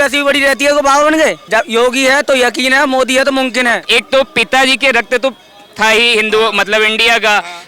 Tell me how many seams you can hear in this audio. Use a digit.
2